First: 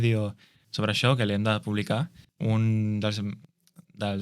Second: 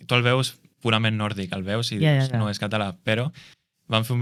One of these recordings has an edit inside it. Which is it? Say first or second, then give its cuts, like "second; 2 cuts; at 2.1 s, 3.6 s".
first; 1 cut; at 2.2 s